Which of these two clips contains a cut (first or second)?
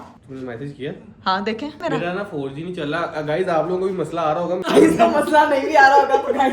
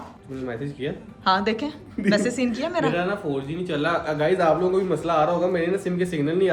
first